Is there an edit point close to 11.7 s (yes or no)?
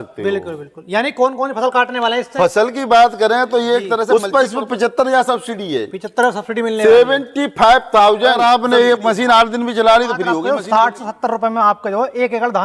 no